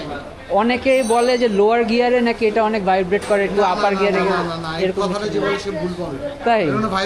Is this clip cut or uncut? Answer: uncut